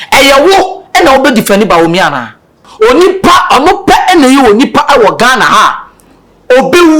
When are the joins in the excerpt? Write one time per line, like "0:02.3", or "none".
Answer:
0:02.6

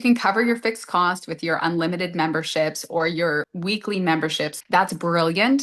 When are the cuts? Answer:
0:03.5
0:04.6

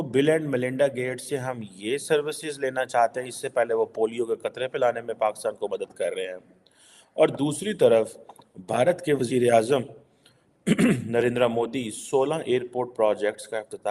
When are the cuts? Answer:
none

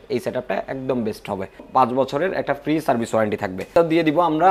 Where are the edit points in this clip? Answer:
0:01.6
0:03.7

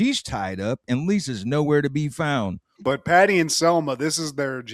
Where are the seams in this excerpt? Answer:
0:02.6

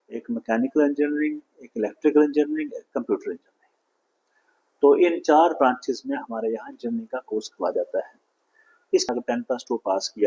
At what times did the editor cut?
0:09.1

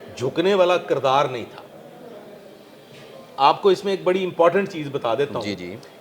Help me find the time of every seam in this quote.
none

